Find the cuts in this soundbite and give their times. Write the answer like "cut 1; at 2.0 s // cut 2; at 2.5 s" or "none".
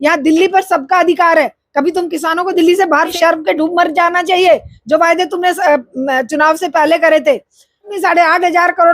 cut 1; at 3.1 s // cut 2; at 7.9 s